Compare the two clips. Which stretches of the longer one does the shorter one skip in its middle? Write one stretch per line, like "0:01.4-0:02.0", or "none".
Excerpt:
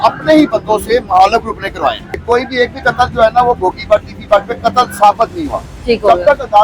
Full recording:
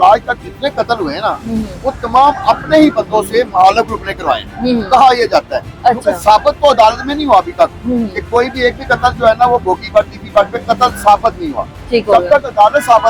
0:04.5-0:08.1